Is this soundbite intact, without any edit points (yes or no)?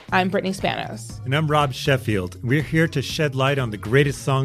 yes